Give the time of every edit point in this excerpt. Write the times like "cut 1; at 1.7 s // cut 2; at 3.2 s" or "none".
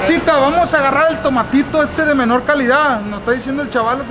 none